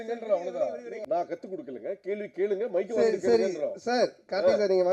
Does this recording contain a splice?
yes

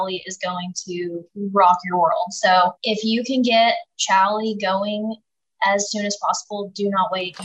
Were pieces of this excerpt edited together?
yes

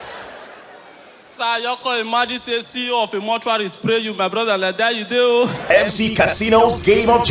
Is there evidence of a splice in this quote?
yes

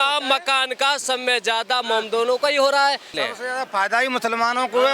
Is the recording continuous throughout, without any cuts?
no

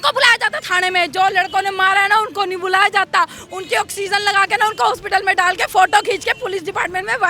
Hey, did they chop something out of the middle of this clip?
no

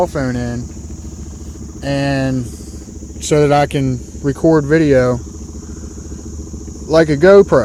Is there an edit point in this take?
no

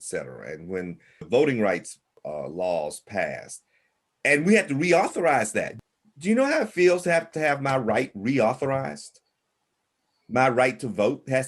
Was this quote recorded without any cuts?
no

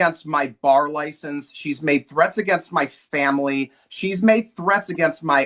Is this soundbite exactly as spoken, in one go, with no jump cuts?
yes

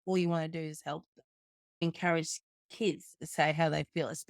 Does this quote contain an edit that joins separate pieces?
yes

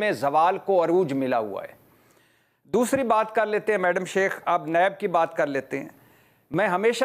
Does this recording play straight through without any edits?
yes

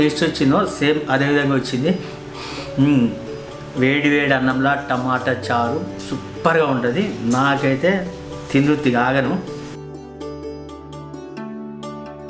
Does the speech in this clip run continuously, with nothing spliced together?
yes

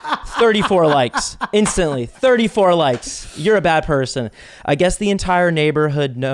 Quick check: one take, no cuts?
yes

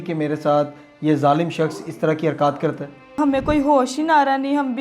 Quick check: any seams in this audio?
yes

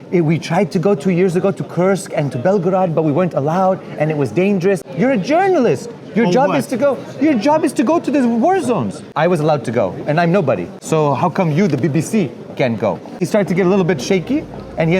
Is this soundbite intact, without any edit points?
no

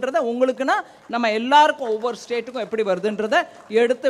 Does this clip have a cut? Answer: no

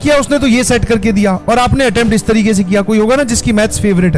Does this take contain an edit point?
no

